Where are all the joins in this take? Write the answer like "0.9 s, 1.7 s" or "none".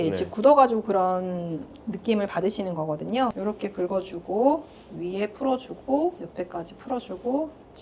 3.4 s, 6.2 s